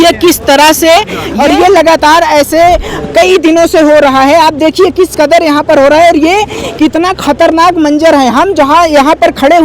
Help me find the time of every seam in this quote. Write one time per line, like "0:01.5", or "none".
0:01.2